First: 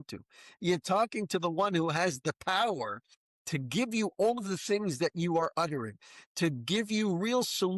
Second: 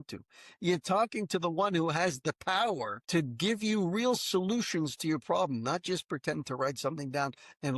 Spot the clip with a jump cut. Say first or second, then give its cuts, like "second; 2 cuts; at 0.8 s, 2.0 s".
second; 1 cut; at 2.9 s